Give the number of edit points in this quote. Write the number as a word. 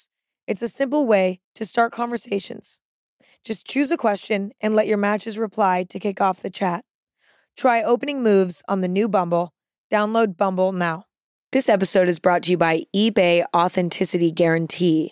one